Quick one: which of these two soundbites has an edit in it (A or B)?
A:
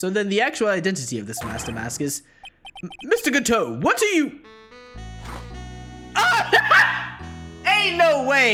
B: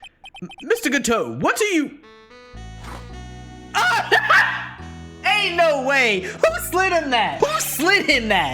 B